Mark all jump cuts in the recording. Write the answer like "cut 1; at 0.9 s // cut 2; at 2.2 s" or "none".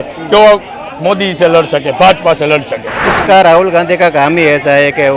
cut 1; at 3.0 s